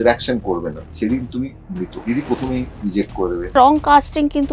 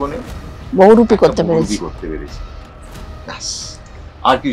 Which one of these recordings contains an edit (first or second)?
first